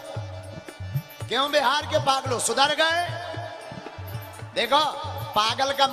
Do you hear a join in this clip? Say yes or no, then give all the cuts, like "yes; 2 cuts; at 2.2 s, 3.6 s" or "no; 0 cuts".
no; 0 cuts